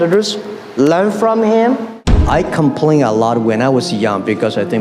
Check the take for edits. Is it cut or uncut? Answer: cut